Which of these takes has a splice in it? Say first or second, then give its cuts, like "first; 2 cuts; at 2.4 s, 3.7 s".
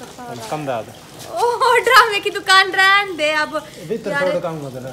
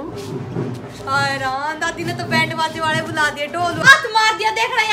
second; 1 cut; at 3.8 s